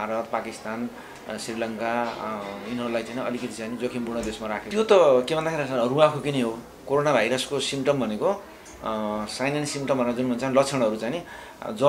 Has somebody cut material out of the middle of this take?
yes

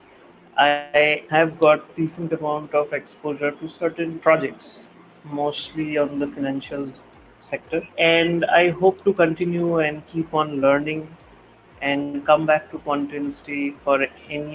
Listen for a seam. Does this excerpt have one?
yes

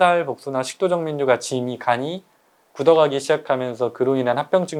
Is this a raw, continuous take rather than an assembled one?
yes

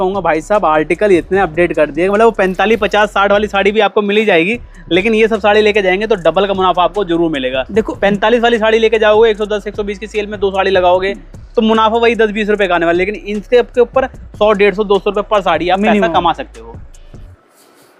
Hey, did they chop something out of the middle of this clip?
no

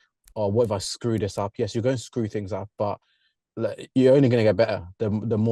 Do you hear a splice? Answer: no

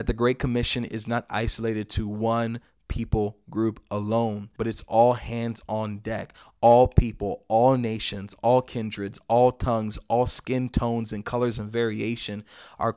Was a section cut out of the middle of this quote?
yes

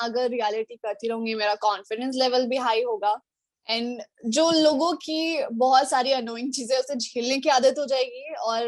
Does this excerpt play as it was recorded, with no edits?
yes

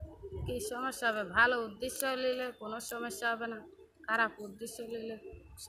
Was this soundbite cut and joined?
no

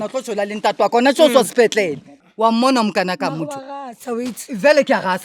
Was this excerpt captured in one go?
no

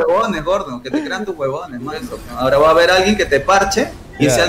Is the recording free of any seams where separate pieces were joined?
no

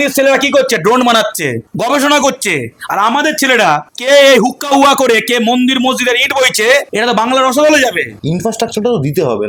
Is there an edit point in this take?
no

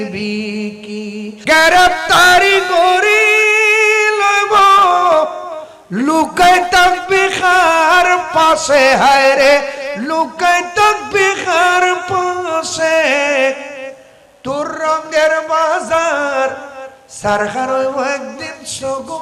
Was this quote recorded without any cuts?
no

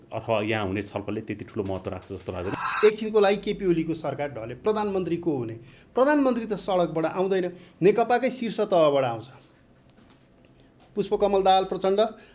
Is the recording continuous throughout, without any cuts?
no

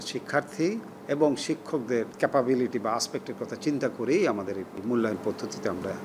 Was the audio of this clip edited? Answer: yes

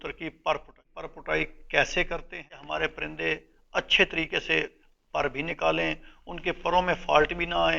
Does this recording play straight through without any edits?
no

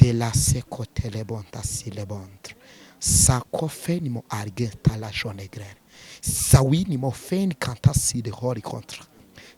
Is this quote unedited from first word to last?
yes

